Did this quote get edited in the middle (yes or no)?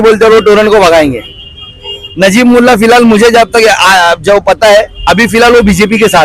no